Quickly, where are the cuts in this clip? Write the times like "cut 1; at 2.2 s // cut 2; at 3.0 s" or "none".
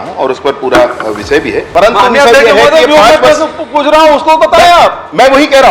cut 1; at 1.6 s

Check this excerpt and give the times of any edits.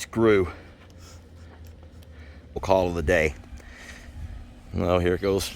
cut 1; at 2.6 s

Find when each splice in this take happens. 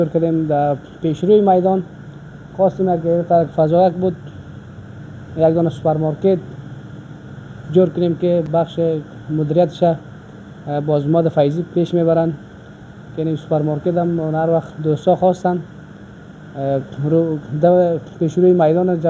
none

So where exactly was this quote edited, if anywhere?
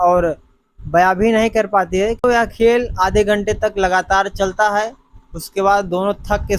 cut 1; at 2.2 s

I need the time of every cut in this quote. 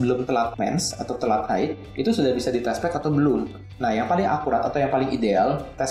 none

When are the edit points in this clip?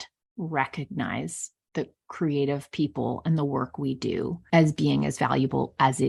none

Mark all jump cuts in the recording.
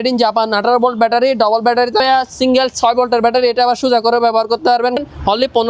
cut 1; at 2.0 s // cut 2; at 5.0 s

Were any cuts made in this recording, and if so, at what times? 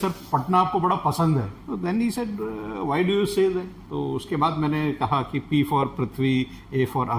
cut 1; at 1.6 s // cut 2; at 3.8 s

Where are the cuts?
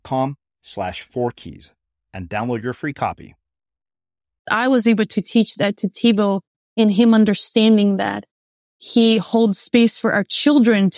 cut 1; at 4.5 s

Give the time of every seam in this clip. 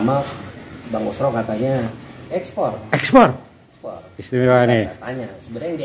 cut 1; at 2.3 s

